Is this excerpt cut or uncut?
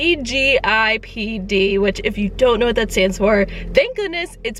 uncut